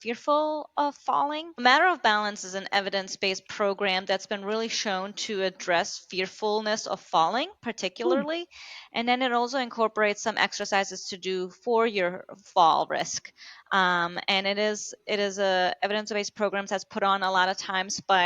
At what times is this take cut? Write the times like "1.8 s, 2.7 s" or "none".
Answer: 1.6 s

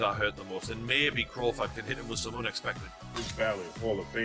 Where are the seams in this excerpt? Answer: 3.3 s

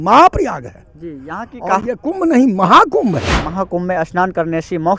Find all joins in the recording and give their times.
3.5 s

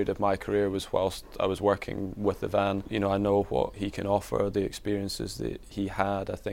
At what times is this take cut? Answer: 2.9 s, 3.8 s, 5.7 s

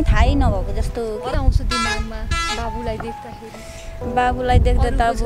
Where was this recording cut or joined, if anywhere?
1.3 s

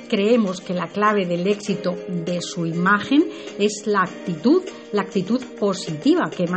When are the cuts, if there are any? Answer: 1.2 s

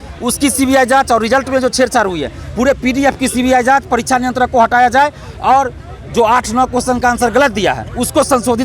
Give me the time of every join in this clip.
none

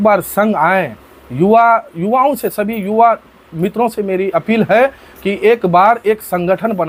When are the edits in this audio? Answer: none

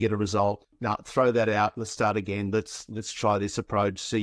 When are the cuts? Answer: none

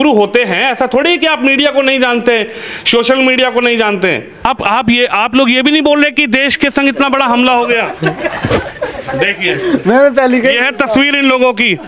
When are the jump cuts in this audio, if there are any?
4.4 s

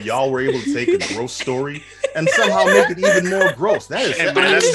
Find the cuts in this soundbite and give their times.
none

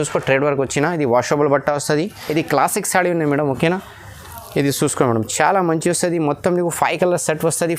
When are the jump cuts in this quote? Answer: 2.2 s

